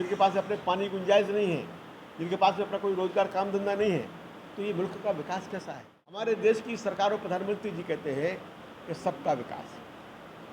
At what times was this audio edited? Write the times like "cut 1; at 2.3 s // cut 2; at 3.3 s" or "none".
cut 1; at 6.2 s